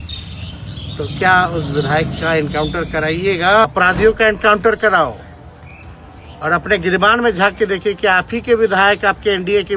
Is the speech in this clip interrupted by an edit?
yes; 1 cut; at 3.6 s

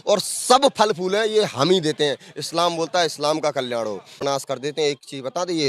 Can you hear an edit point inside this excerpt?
yes; 1 cut; at 4.2 s

